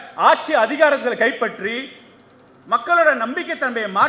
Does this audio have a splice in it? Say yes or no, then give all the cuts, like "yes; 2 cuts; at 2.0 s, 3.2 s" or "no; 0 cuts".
no; 0 cuts